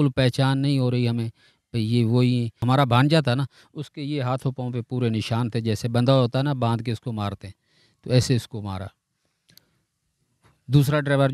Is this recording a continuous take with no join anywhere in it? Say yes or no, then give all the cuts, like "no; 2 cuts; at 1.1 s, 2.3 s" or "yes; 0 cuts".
no; 1 cut; at 2.5 s